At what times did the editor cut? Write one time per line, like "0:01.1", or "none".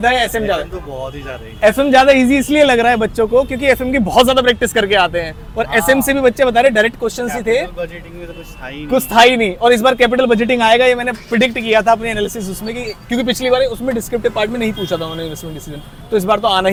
none